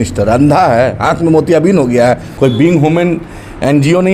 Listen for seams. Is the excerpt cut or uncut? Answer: cut